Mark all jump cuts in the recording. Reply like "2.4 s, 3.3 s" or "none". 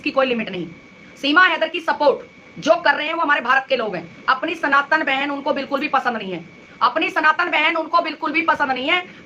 none